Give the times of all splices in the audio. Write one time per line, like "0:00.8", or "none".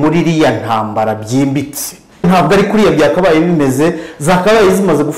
0:02.2